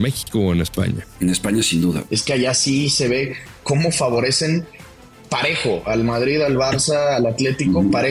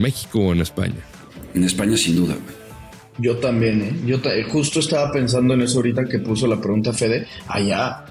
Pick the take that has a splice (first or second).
first